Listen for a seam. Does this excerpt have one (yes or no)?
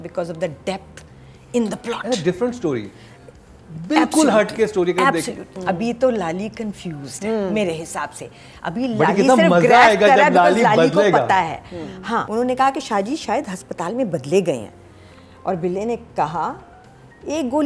yes